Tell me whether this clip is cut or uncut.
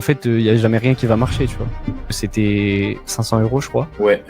cut